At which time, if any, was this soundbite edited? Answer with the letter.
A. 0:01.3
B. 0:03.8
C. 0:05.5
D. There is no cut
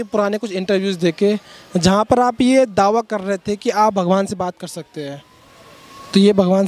D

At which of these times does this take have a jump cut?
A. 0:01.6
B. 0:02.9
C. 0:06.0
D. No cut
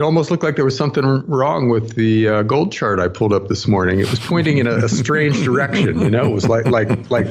B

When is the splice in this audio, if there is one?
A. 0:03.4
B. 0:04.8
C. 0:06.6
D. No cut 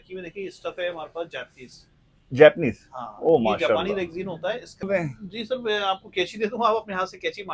B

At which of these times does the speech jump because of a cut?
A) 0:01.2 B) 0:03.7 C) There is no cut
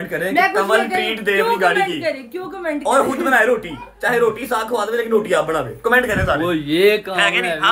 C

